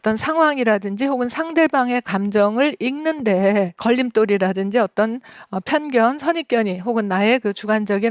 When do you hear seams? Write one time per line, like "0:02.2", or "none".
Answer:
0:03.8